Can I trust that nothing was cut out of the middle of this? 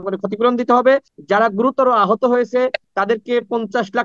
no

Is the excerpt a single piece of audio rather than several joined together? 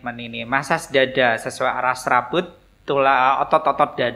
yes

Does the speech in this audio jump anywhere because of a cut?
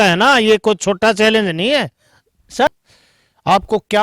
yes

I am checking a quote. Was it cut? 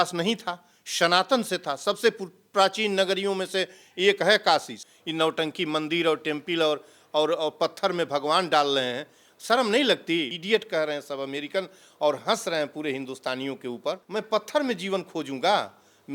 yes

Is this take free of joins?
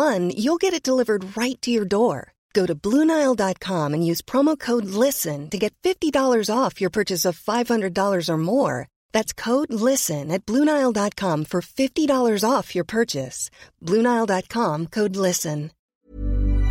no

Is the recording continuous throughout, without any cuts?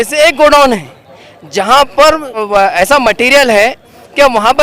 no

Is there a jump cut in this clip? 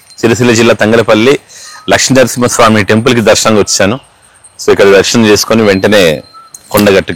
no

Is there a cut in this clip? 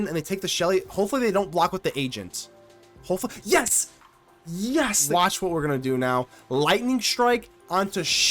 yes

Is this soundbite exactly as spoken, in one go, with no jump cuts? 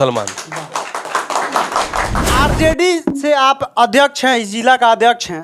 no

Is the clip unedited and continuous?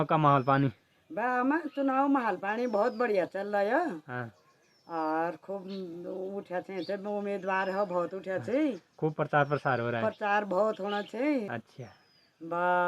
yes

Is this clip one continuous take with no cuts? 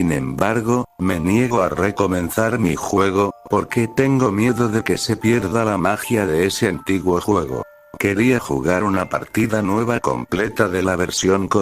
no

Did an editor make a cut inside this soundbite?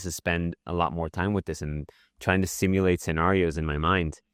no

